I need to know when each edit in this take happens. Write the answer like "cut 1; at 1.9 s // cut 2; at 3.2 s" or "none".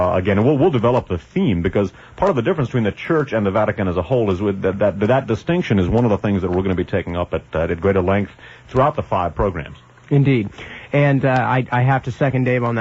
cut 1; at 7.8 s

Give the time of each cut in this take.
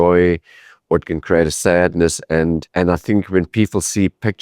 cut 1; at 2.7 s

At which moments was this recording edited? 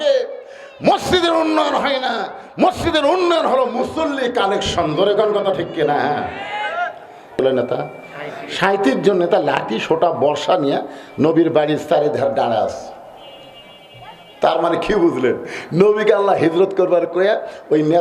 cut 1; at 7.4 s

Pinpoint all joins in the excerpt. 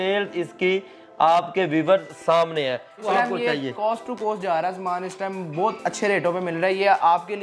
cut 1; at 3.0 s

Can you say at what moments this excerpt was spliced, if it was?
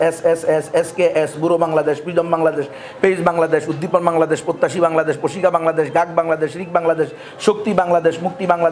none

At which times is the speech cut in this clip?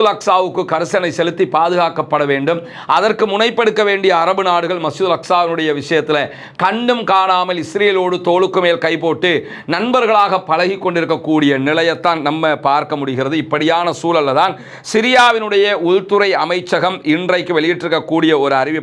none

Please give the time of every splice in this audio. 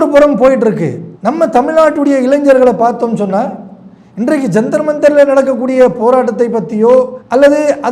none

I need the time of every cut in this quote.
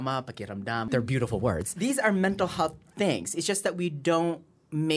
cut 1; at 0.9 s // cut 2; at 1.7 s

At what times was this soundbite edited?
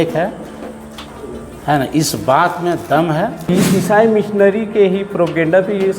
cut 1; at 3.4 s

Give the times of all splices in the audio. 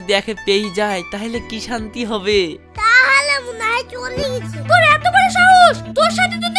cut 1; at 4.4 s

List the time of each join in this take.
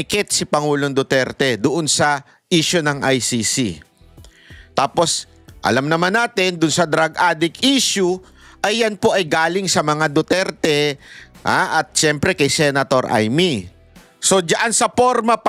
none

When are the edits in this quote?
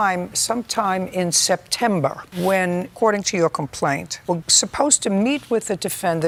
none

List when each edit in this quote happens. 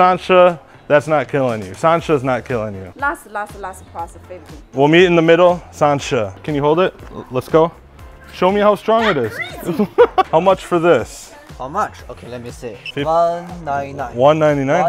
cut 1; at 4.6 s // cut 2; at 6.4 s // cut 3; at 10.3 s

